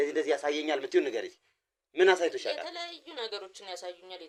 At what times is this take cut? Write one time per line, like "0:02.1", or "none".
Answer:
none